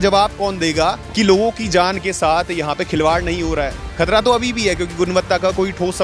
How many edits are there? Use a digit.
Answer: 2